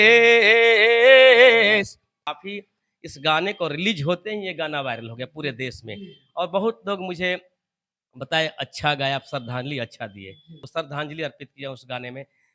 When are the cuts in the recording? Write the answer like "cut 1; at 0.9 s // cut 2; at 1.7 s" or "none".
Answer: cut 1; at 2.3 s // cut 2; at 10.6 s